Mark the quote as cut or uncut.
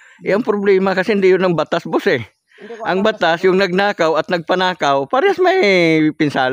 uncut